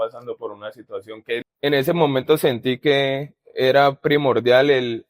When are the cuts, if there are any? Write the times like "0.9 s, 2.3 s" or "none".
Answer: 1.4 s